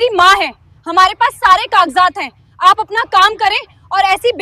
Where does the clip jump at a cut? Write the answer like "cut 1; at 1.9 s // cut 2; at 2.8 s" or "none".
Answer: none